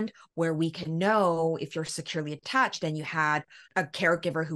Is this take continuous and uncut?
yes; 0 cuts

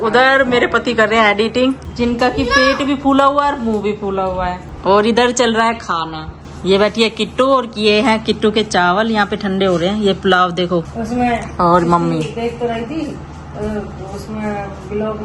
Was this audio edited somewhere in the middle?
no; 0 cuts

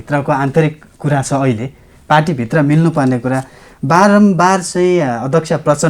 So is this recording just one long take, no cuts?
yes; 0 cuts

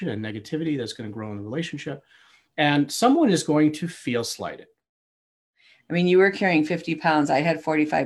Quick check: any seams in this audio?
yes; 1 cut; at 5.2 s

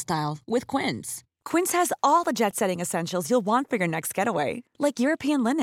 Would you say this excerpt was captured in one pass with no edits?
yes; 0 cuts

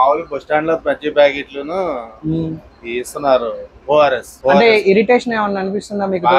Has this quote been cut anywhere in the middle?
yes; 1 cut; at 4.3 s

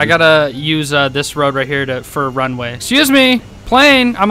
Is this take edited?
yes; 1 cut; at 2.7 s

